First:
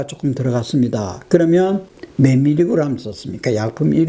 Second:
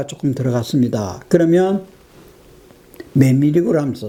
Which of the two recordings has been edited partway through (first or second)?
first